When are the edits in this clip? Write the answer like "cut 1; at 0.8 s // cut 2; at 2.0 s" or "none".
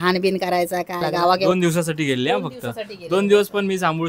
cut 1; at 1.4 s